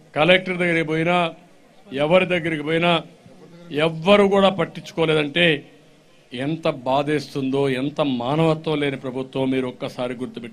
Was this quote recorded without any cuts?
yes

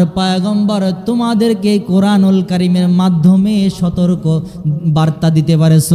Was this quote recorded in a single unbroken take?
yes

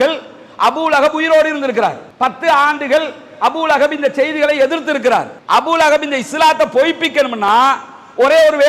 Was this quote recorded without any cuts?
yes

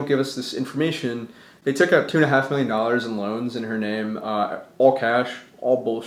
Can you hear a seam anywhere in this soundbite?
no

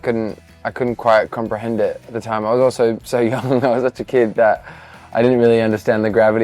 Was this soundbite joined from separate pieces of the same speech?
no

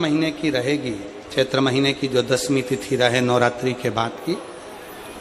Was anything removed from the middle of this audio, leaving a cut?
no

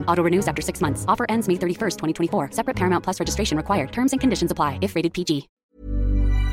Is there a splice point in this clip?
yes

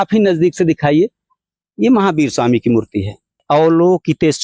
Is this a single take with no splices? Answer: no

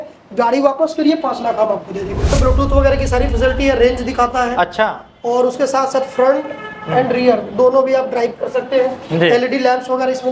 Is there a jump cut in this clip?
yes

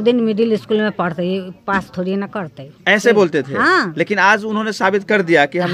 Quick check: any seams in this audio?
no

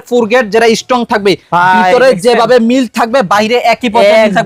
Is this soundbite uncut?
yes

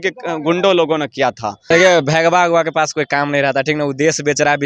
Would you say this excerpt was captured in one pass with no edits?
no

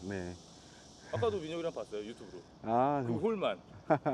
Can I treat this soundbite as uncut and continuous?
yes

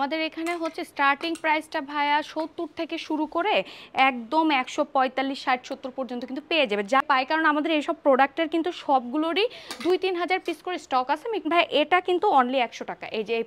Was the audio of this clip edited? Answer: yes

